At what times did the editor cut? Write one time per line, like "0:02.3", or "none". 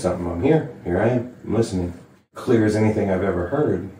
0:02.3